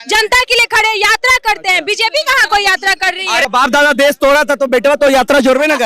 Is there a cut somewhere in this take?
yes; 1 cut; at 3.4 s

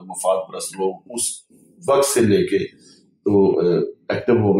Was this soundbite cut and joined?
no; 0 cuts

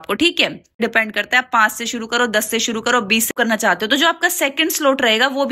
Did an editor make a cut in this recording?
yes; 2 cuts; at 0.8 s, 3.3 s

